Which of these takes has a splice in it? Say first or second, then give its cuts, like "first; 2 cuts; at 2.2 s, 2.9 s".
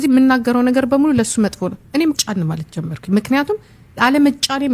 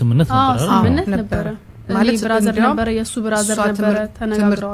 first; 1 cut; at 2.2 s